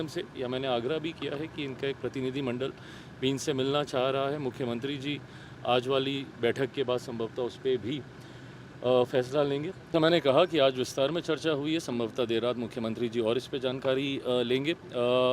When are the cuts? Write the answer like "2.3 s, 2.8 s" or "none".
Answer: 9.8 s